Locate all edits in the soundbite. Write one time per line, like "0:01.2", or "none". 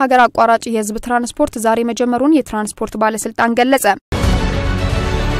0:04.1